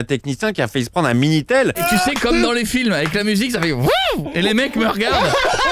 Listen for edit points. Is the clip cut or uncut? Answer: cut